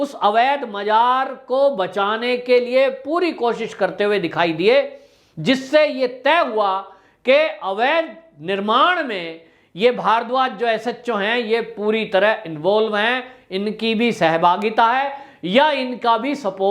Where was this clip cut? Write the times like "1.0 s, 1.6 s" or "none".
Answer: none